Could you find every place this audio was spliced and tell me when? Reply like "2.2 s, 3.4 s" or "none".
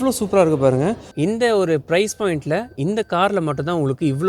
1.1 s